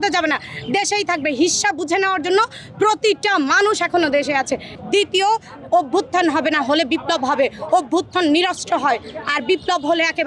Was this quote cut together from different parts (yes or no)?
yes